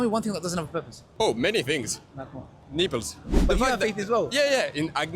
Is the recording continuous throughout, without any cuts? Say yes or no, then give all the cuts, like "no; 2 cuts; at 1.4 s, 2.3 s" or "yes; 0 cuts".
no; 2 cuts; at 1.0 s, 3.3 s